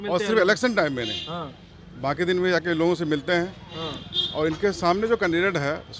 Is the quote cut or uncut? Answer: uncut